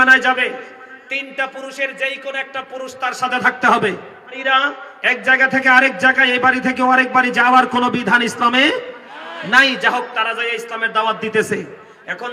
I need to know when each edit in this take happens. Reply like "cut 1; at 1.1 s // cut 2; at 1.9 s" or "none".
cut 1; at 4.4 s